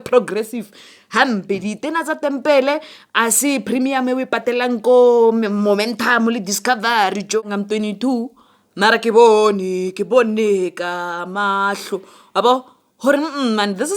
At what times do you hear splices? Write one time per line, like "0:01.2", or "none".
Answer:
0:07.4